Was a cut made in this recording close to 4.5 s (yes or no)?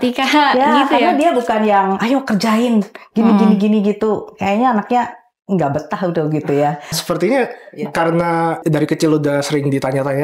no